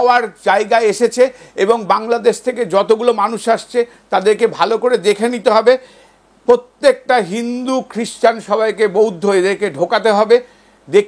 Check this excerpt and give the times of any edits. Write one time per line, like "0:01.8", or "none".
none